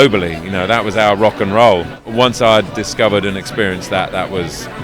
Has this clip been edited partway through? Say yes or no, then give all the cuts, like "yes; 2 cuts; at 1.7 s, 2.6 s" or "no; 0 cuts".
yes; 1 cut; at 2.0 s